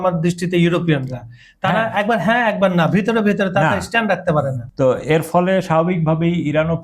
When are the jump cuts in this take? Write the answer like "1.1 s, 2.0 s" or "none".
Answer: 4.6 s